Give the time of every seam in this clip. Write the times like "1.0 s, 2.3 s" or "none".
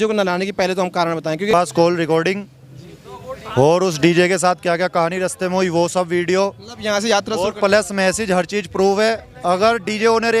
1.5 s